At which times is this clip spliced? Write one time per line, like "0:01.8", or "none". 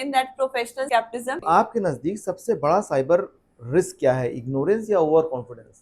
0:01.4